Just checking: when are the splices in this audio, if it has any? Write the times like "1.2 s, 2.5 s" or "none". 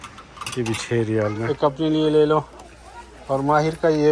1.4 s